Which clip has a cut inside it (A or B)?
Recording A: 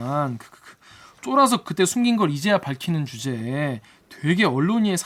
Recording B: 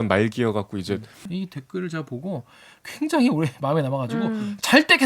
B